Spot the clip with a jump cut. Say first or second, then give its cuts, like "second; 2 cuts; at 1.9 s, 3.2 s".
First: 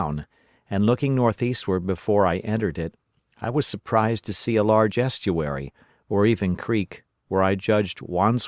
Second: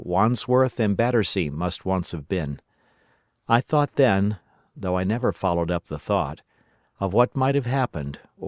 first; 1 cut; at 6.2 s